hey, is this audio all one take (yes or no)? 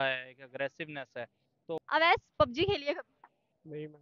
no